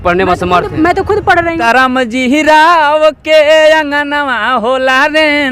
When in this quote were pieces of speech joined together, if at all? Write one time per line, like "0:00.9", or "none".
0:01.6